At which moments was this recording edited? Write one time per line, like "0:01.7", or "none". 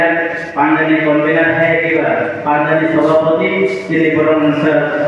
none